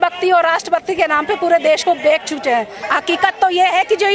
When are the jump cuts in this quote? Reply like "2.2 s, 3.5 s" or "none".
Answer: 2.8 s